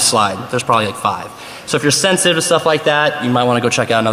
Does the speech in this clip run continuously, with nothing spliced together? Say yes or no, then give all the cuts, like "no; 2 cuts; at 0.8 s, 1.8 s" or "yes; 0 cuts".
yes; 0 cuts